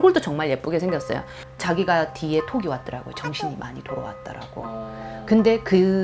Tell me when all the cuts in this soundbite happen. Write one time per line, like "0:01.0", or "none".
0:01.5